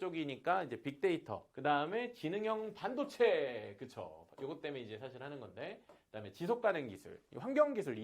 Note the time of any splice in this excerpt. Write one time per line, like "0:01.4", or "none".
0:01.5